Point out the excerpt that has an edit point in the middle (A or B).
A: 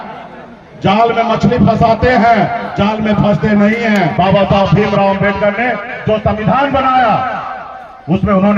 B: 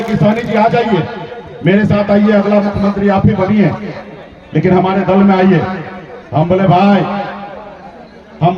A